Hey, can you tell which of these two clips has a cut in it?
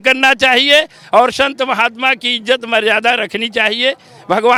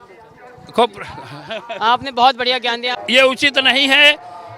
second; 1 cut; at 3.0 s

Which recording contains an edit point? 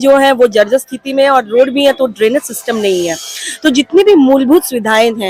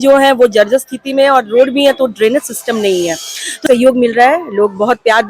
second; 1 cut; at 3.6 s

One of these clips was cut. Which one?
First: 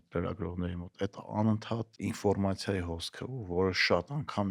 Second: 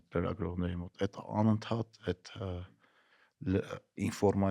first; 1 cut; at 1.9 s

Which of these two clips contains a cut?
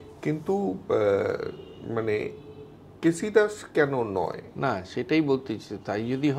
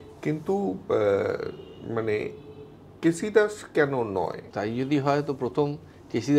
second; 1 cut; at 4.4 s

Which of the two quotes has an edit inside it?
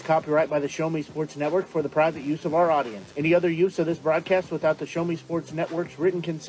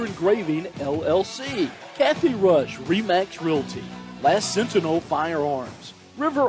second; 1 cut; at 1.8 s

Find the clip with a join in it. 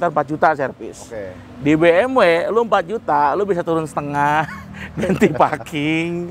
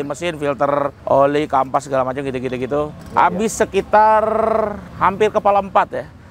second; 3 cuts; at 1.0 s, 3.0 s, 4.8 s

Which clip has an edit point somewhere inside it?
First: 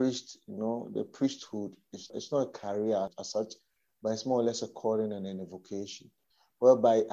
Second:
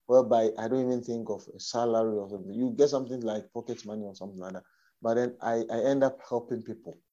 first; 2 cuts; at 2.1 s, 3.2 s

